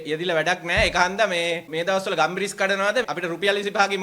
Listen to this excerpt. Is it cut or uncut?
cut